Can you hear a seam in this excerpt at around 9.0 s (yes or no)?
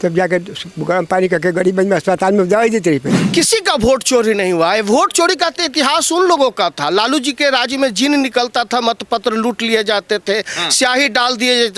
no